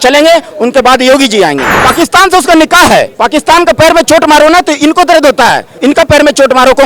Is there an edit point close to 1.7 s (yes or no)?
yes